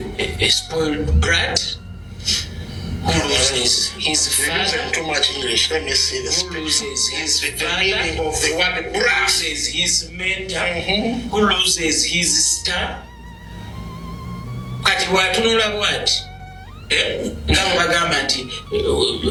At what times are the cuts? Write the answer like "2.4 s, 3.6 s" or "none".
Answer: none